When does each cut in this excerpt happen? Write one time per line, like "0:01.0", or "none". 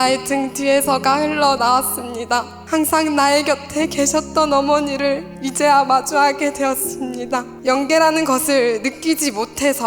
0:02.6
0:05.4
0:07.5